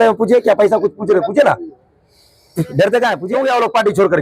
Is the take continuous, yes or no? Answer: no